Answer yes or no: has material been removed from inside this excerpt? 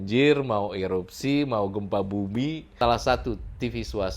yes